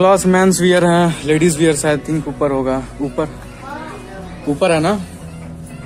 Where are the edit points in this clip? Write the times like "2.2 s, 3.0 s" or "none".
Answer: none